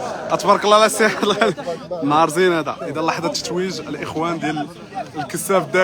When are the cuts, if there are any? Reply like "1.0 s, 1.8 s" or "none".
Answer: none